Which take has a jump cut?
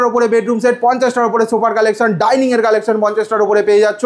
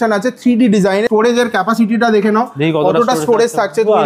second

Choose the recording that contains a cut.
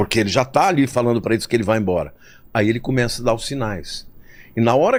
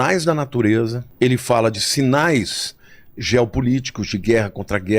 second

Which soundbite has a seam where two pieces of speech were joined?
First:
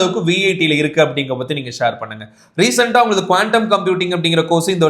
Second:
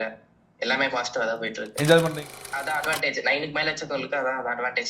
second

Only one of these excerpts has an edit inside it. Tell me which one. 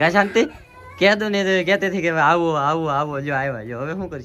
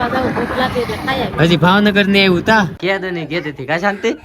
second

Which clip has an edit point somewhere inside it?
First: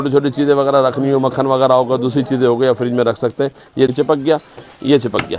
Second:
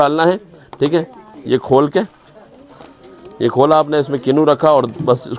first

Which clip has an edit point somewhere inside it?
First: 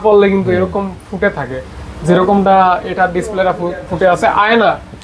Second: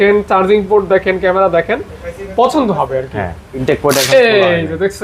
second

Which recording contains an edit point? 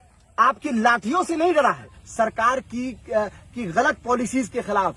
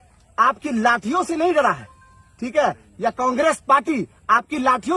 first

